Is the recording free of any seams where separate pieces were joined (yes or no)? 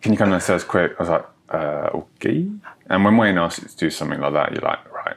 yes